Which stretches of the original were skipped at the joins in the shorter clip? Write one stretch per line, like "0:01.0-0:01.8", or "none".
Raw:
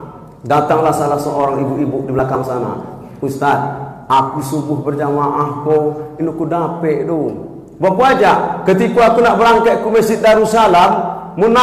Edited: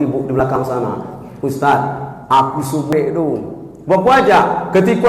0:04.7-0:06.9